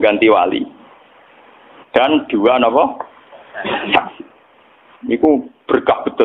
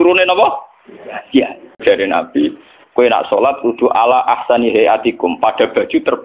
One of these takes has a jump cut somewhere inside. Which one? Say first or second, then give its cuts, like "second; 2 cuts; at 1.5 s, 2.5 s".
second; 1 cut; at 1.8 s